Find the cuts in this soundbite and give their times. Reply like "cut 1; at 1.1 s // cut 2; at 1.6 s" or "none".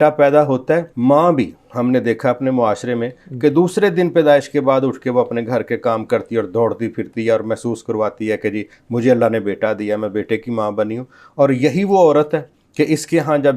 cut 1; at 0.9 s